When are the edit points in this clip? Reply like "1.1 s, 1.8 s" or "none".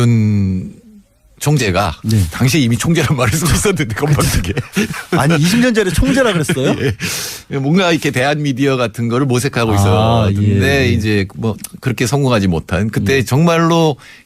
6.8 s